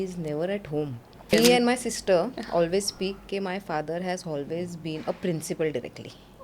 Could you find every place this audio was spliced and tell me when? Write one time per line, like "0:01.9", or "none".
0:01.3